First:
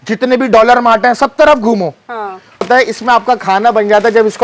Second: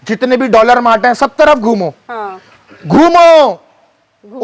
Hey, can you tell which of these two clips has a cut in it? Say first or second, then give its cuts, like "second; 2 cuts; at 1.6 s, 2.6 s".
first; 1 cut; at 2.7 s